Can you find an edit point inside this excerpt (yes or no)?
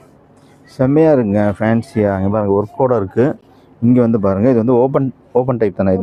no